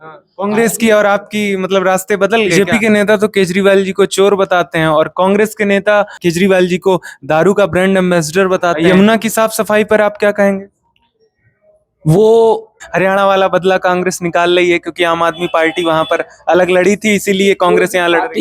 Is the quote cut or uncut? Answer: cut